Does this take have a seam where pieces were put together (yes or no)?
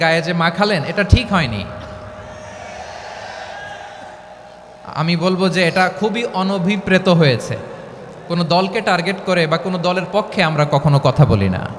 no